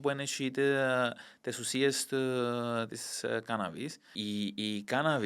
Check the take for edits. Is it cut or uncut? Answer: cut